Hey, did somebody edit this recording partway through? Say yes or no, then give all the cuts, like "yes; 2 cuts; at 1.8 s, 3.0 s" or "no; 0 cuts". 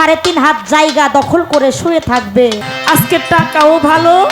yes; 1 cut; at 2.7 s